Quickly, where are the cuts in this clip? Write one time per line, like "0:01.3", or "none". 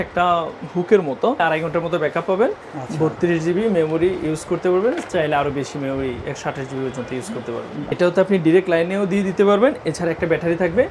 0:01.4
0:07.9